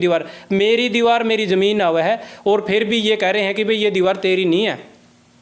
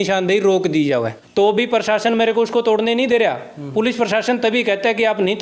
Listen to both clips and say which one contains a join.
second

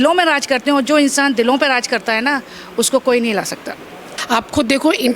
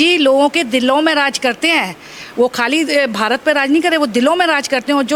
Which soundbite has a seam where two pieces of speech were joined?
first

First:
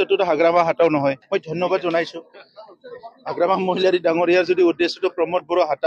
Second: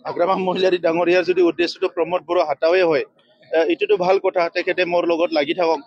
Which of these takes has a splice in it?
first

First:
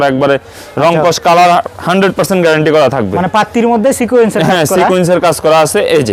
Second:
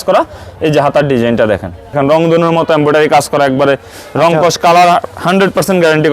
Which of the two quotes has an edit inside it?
second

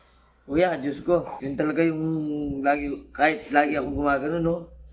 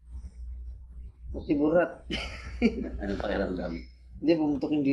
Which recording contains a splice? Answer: first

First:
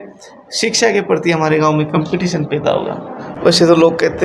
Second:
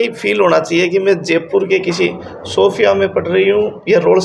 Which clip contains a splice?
first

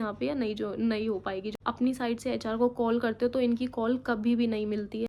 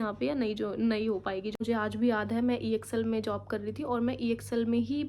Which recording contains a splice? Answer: second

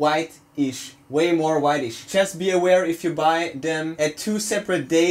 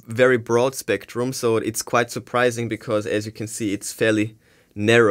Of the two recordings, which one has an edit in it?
first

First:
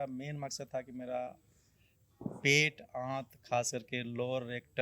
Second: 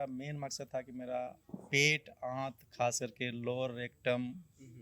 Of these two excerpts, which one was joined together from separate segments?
second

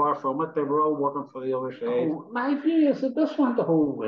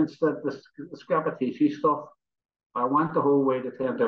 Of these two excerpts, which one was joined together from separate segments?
first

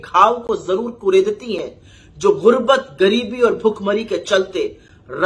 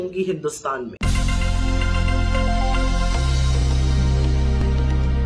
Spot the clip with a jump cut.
second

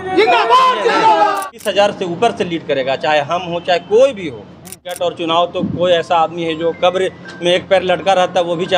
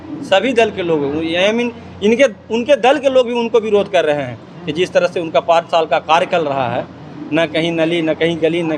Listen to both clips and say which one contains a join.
first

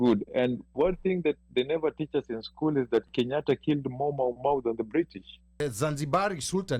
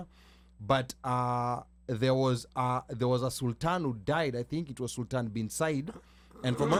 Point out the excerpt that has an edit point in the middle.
first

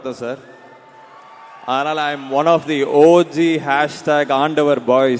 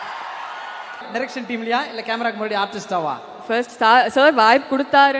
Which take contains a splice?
second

